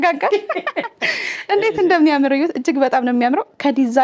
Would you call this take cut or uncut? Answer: uncut